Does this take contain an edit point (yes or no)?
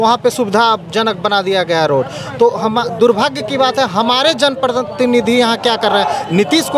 no